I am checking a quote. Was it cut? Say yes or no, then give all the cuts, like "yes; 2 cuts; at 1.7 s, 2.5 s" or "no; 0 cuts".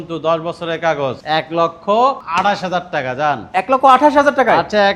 no; 0 cuts